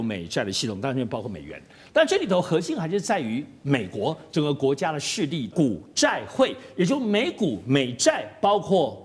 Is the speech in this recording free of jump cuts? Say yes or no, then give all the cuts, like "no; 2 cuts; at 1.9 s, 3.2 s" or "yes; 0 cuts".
no; 1 cut; at 5.5 s